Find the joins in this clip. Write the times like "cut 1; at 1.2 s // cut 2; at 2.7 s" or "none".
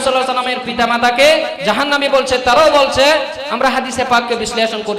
cut 1; at 1.6 s